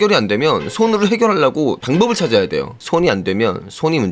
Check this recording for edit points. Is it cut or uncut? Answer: cut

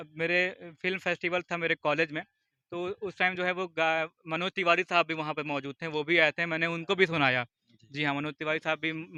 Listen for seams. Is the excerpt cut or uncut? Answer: uncut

